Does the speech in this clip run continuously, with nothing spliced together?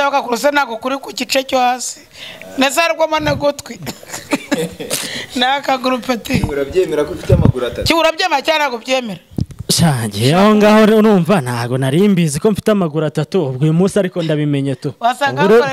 yes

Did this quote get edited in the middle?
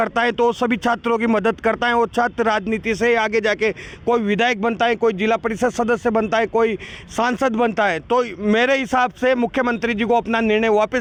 no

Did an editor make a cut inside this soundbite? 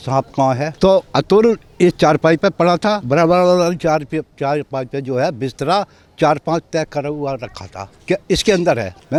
no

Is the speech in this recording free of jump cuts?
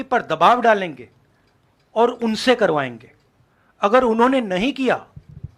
yes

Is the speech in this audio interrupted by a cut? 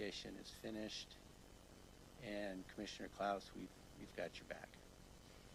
no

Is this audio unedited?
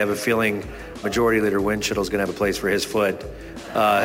no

